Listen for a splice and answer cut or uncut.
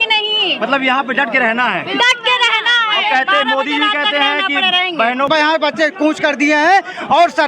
cut